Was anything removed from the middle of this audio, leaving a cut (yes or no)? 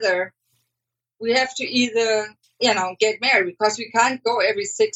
no